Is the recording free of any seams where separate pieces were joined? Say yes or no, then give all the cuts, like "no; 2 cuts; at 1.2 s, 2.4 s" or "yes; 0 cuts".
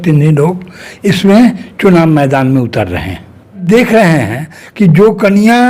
no; 1 cut; at 3.6 s